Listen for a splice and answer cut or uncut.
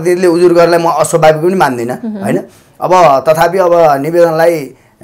uncut